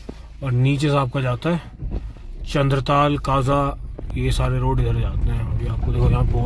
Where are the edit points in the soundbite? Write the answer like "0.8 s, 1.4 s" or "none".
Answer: none